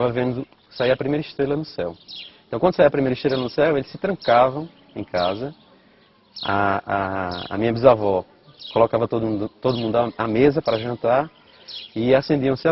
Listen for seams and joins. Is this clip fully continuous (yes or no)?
yes